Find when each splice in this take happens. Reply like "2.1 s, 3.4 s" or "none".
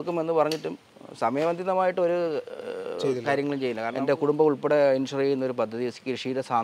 3.9 s